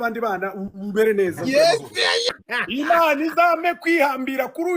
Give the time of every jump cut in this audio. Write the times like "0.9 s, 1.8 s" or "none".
2.3 s